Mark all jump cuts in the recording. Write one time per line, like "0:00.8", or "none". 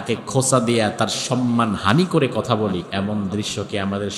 0:02.8